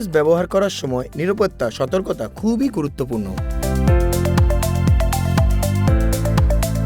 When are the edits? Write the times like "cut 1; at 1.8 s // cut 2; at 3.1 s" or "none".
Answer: cut 1; at 3.5 s

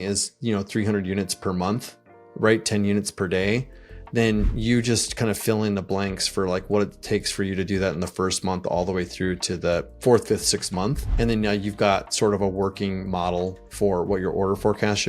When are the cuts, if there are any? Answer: cut 1; at 9.9 s // cut 2; at 11.0 s

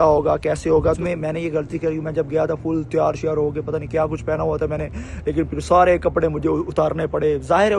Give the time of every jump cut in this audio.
cut 1; at 1.0 s

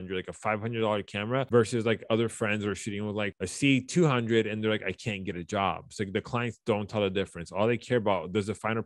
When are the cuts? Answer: cut 1; at 3.3 s

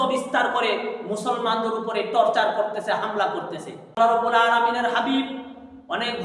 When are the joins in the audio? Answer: cut 1; at 4.0 s

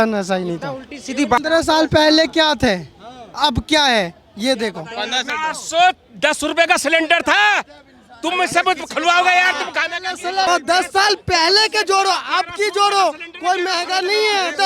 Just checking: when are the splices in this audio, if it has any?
cut 1; at 1.4 s // cut 2; at 5.3 s // cut 3; at 10.5 s

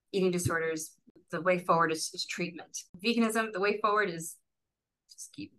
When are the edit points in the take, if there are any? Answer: cut 1; at 1.3 s // cut 2; at 2.9 s

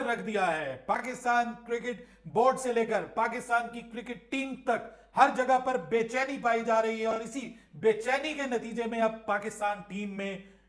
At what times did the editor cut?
none

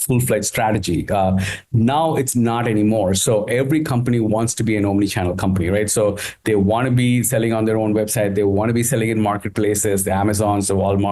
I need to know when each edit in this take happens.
none

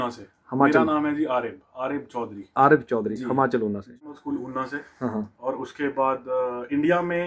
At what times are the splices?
cut 1; at 4.1 s

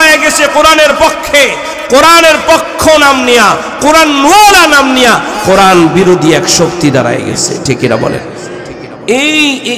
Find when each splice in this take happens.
cut 1; at 5.3 s // cut 2; at 9.0 s

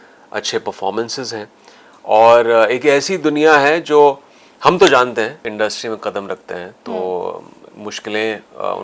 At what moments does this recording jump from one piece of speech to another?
cut 1; at 5.4 s

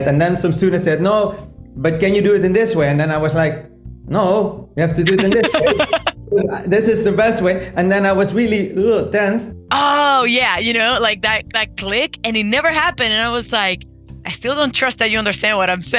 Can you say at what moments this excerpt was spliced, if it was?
cut 1; at 9.5 s

